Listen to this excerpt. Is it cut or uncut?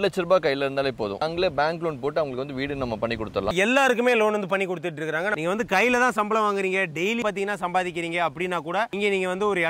cut